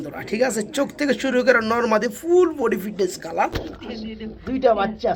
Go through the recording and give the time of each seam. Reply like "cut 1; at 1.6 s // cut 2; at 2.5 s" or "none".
cut 1; at 3.4 s